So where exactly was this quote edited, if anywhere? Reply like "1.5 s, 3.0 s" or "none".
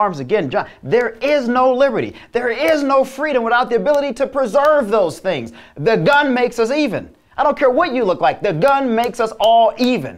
none